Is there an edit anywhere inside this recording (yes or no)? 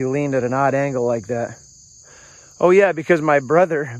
no